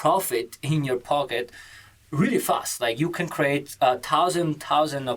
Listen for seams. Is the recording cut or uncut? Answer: uncut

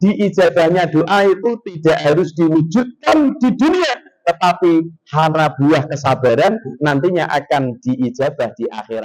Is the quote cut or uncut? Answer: uncut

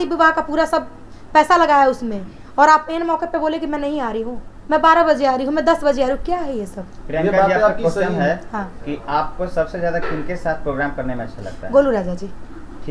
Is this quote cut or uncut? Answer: uncut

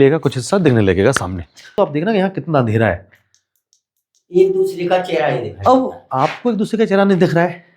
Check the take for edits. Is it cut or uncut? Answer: cut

